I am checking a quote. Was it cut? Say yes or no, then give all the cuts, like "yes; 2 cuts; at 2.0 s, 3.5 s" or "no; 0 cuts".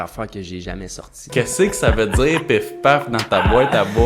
yes; 1 cut; at 1.3 s